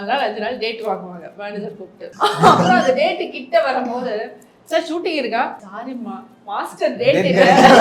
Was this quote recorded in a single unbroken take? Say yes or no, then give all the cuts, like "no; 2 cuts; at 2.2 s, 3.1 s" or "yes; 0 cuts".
no; 2 cuts; at 2.1 s, 5.7 s